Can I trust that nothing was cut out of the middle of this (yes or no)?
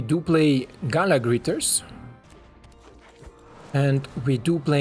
no